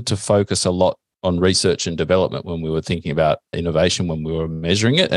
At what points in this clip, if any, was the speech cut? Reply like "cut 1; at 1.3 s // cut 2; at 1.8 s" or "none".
cut 1; at 1.1 s // cut 2; at 3.5 s